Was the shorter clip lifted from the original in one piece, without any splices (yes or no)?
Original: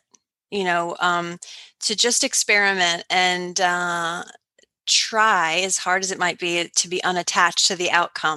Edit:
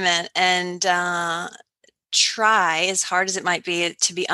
yes